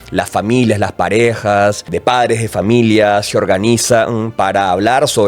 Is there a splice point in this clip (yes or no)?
yes